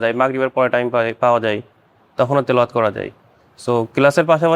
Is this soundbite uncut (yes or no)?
yes